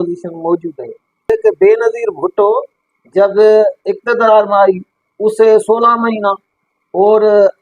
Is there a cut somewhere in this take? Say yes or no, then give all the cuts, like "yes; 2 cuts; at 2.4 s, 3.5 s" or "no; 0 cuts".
yes; 1 cut; at 1.3 s